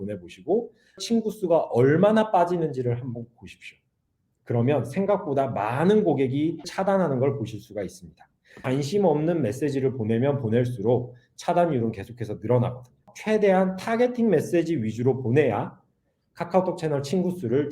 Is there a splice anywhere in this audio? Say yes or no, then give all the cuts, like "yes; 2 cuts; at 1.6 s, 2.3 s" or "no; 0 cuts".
yes; 4 cuts; at 1.0 s, 6.7 s, 8.6 s, 13.1 s